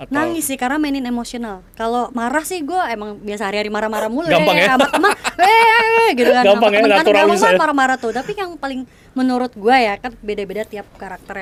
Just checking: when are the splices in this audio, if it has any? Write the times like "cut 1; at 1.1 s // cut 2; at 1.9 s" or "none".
none

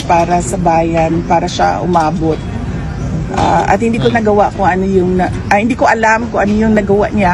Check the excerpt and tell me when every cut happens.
none

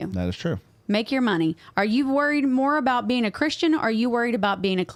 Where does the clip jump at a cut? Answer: none

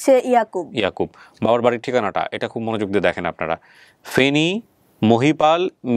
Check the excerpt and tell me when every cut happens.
none

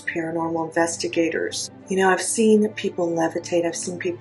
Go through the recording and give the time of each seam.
cut 1; at 1.7 s

